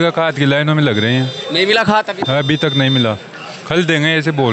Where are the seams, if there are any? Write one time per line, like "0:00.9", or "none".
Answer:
none